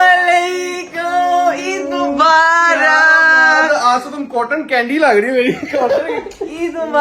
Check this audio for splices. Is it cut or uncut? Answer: uncut